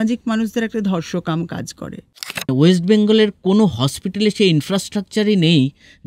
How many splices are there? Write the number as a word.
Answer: one